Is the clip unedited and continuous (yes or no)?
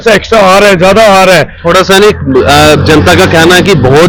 yes